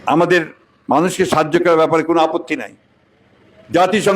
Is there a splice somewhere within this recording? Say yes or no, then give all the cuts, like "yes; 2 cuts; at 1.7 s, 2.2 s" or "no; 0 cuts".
no; 0 cuts